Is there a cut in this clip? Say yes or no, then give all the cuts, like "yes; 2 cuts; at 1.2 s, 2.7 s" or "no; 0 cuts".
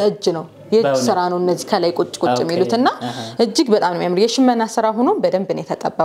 no; 0 cuts